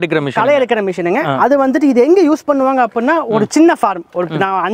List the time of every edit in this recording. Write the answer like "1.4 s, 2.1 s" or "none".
none